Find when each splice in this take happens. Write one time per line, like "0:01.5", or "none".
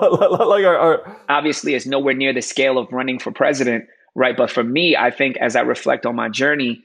0:01.1